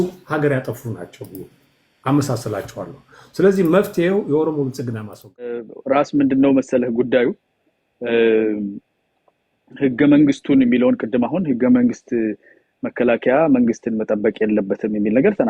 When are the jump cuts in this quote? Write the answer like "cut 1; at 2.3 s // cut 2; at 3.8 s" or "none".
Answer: cut 1; at 5.7 s